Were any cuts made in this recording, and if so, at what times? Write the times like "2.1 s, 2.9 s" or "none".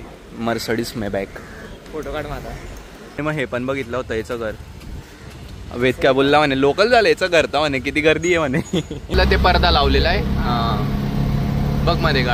1.8 s, 3.2 s, 9.1 s